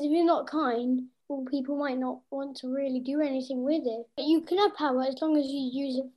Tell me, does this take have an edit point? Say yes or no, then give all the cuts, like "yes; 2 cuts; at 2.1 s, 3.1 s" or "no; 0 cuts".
yes; 2 cuts; at 1.2 s, 4.2 s